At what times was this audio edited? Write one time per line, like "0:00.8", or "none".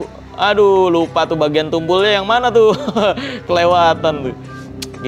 none